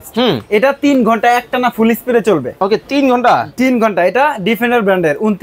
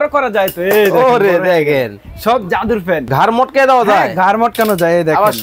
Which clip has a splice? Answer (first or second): second